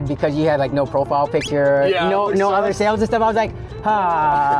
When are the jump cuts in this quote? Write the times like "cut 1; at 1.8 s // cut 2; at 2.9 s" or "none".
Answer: none